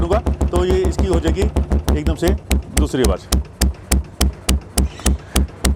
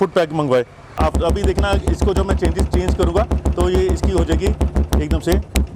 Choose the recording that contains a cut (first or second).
second